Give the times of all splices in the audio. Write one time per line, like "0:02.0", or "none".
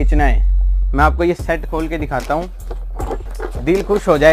0:03.3